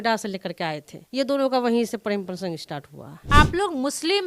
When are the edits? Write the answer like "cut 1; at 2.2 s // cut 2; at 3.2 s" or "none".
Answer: cut 1; at 0.9 s // cut 2; at 3.2 s

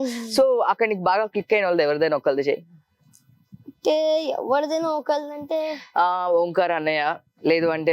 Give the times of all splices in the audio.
none

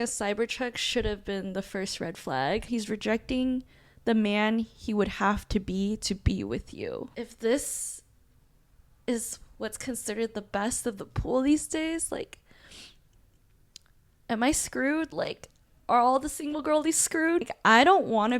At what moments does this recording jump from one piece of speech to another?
cut 1; at 2.7 s // cut 2; at 7.1 s // cut 3; at 17.5 s

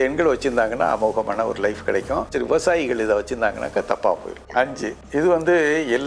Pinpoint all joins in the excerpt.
cut 1; at 2.4 s // cut 2; at 4.5 s

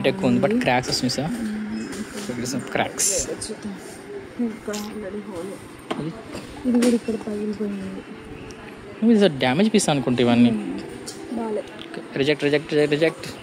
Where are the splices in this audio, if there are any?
none

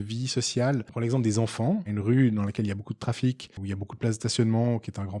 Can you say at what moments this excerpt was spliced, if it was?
cut 1; at 0.9 s // cut 2; at 1.9 s // cut 3; at 3.5 s

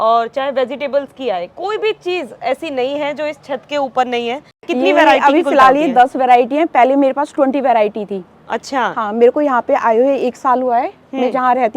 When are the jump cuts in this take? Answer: cut 1; at 4.5 s

